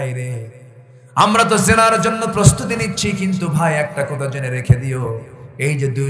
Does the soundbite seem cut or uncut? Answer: uncut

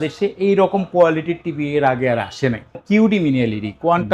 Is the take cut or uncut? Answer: cut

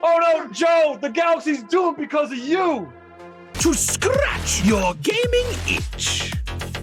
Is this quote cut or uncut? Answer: uncut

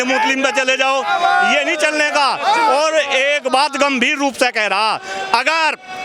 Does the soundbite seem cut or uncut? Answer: uncut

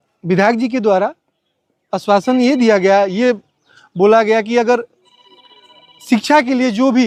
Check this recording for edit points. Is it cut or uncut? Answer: uncut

